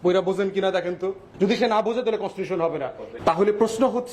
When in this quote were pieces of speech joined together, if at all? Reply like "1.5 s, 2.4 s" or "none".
1.2 s, 3.0 s

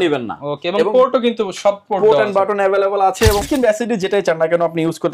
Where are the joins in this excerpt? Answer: 3.4 s

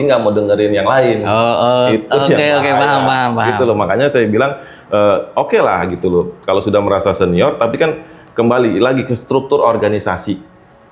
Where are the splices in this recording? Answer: none

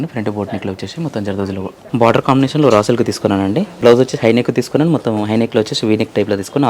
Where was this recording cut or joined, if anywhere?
1.8 s, 3.7 s

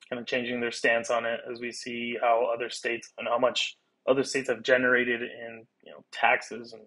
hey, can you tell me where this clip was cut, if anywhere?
none

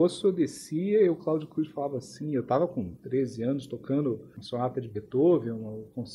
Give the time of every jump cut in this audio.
2.9 s, 4.4 s

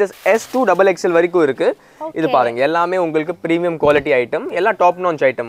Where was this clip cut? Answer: none

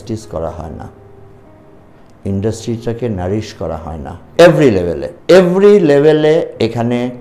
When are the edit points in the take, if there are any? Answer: 5.1 s

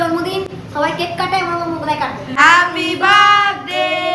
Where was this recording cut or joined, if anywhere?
2.3 s

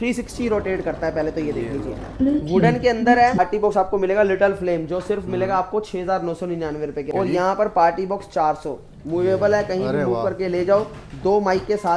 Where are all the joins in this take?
3.4 s, 7.1 s

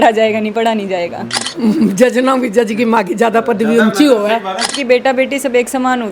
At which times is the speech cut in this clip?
1.4 s, 4.7 s

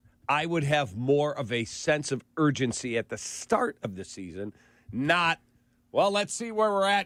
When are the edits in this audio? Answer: none

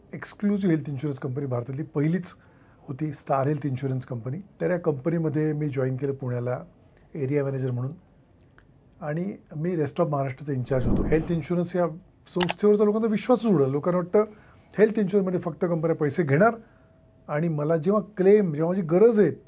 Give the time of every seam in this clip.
4.4 s, 11.0 s

